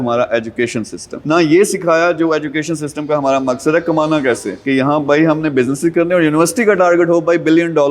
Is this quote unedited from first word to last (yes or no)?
no